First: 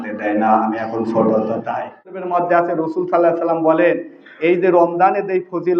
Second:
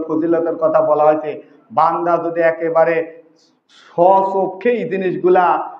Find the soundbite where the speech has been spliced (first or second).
first